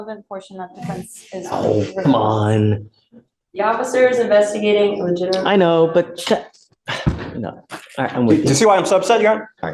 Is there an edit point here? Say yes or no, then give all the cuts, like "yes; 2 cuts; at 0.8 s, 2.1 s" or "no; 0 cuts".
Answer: no; 0 cuts